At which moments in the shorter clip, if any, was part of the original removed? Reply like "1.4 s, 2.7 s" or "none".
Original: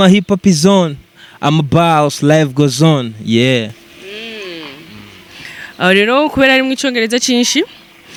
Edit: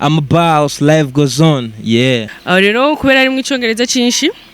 2.3 s

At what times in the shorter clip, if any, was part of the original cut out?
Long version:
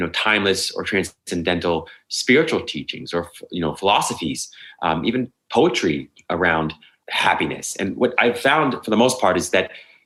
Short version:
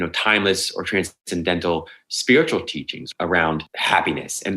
3.0 s, 3.7 s

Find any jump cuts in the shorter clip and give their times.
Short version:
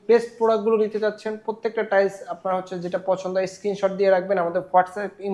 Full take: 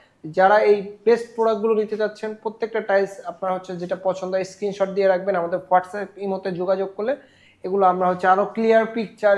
none

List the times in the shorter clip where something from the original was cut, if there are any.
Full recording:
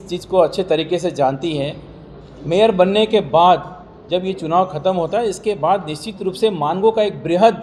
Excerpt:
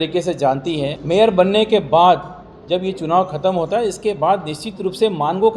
1.0 s

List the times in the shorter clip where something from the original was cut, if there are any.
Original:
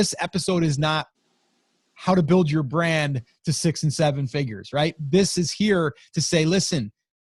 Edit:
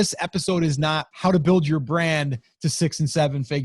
1.1 s

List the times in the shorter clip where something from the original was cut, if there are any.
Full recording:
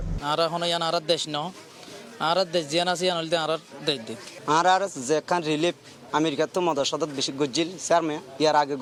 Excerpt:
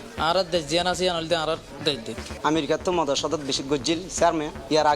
2.2 s

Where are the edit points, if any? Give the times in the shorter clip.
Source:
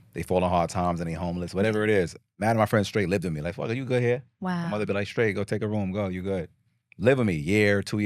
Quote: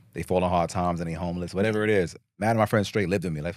none

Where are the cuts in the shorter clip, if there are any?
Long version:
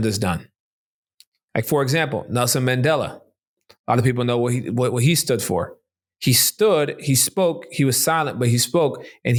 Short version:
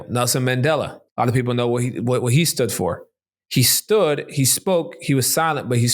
1.0 s

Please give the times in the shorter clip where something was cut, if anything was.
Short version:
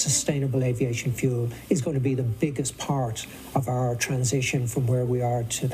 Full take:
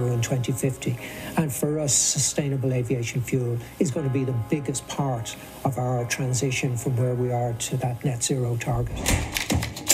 none

